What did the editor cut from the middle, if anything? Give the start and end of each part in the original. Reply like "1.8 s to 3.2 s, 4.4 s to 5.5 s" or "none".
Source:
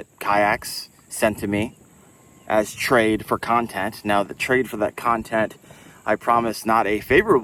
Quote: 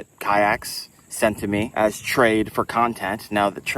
1.7 s to 2.4 s

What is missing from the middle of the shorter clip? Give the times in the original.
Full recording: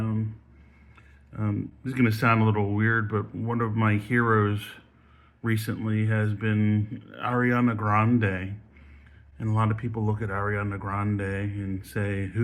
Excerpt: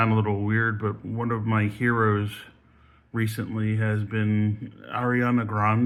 none

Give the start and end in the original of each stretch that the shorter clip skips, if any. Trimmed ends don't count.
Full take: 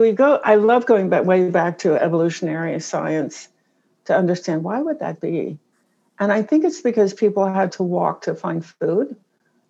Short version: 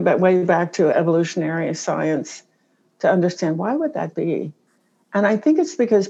none

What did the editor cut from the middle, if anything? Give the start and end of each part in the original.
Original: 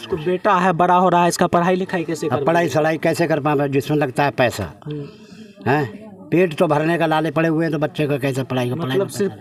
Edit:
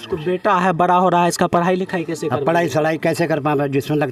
none

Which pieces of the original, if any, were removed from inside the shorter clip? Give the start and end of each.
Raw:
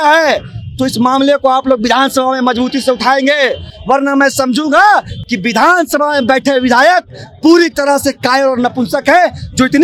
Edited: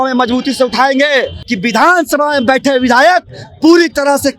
3.7 s to 5.2 s

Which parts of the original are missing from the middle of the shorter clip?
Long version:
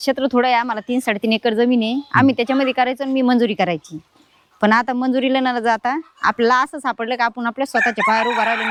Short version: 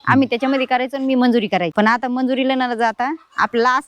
3.8 s to 4.5 s

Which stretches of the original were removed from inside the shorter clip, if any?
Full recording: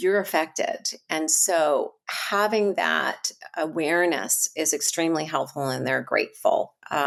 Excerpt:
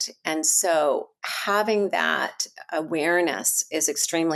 none

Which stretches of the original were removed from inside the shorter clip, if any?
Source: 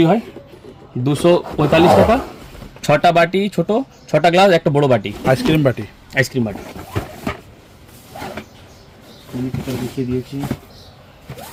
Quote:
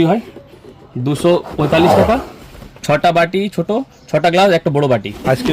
none

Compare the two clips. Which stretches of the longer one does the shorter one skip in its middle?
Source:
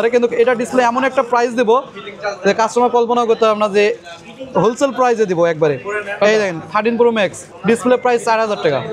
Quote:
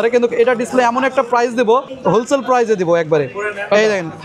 1.9 s to 4.4 s

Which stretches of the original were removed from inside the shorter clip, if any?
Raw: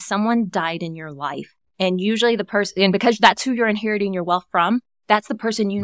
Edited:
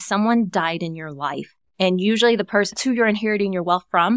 2.8 s to 3.4 s

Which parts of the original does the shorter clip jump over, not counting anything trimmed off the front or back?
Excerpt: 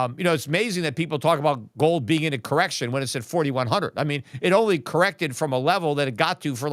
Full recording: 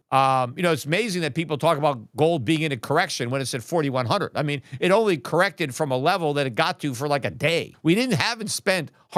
none

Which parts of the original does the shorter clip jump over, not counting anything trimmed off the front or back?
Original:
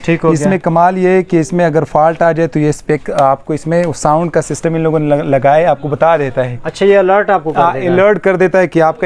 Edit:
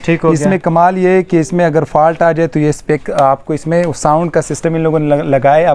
none

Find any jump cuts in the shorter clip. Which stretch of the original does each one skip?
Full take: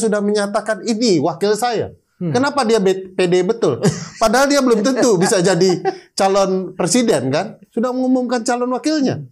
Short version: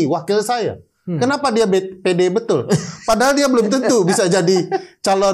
none

